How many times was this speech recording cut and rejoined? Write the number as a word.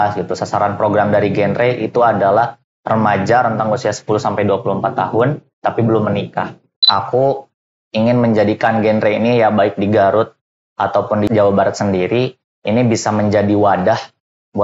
two